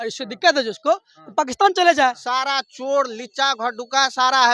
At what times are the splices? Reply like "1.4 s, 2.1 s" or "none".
2.2 s